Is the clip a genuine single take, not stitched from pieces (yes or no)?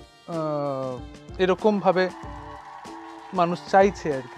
yes